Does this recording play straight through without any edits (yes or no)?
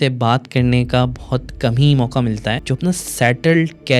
no